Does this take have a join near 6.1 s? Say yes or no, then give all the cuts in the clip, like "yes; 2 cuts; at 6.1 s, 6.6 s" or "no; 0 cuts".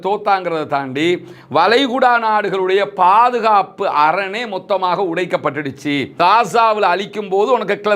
yes; 1 cut; at 6.1 s